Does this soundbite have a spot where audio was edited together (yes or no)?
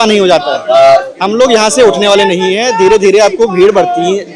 no